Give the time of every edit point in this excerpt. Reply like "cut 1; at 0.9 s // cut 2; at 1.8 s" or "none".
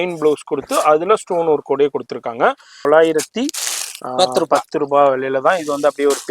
cut 1; at 2.9 s